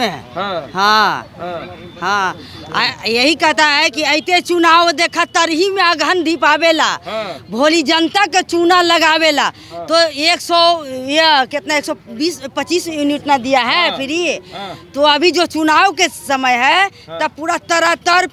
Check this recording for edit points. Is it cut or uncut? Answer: uncut